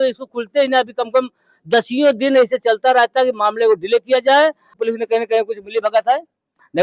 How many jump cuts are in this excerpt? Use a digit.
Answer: 1